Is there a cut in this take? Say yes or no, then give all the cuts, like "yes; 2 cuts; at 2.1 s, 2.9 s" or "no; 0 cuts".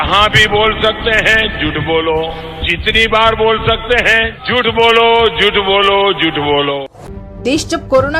yes; 1 cut; at 7.0 s